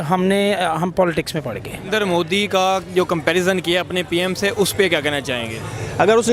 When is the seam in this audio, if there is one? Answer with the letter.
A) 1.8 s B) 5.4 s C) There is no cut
A